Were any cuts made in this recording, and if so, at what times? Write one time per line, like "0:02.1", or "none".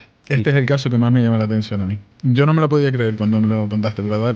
none